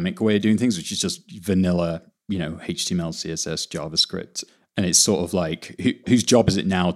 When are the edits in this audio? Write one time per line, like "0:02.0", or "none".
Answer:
0:04.4
0:06.1